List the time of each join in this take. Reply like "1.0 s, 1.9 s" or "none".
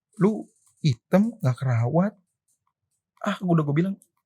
none